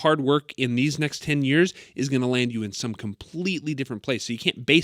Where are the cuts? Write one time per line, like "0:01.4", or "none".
none